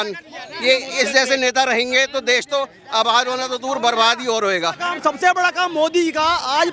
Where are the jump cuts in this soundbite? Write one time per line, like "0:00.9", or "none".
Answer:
0:04.9